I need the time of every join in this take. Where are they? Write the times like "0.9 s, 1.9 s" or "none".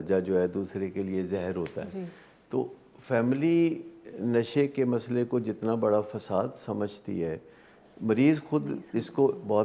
none